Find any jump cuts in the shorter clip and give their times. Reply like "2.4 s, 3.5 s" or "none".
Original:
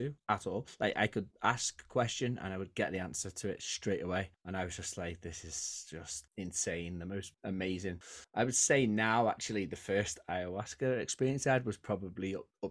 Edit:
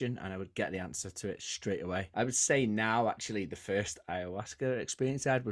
2.1 s